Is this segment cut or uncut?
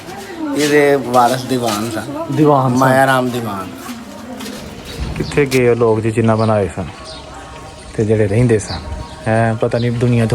cut